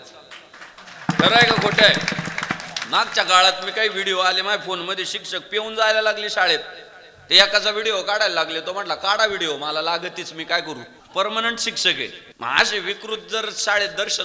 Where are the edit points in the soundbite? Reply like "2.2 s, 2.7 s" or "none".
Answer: 10.9 s, 12.2 s